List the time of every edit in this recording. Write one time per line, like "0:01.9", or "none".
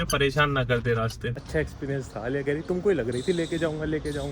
0:01.3

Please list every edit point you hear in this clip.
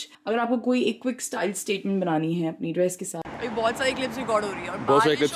0:03.2

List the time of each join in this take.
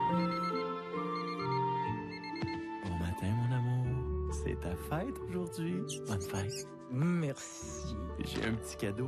none

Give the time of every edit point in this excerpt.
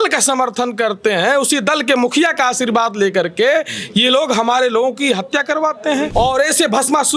0:06.1

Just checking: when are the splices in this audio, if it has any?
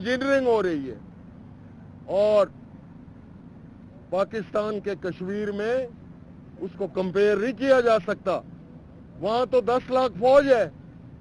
none

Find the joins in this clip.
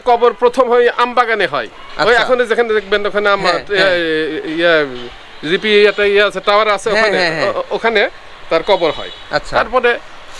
none

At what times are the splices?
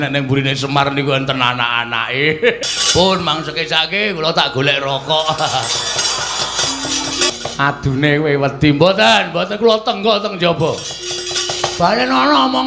0:02.6
0:07.3

